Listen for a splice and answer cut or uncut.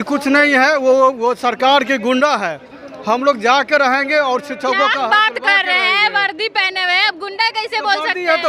uncut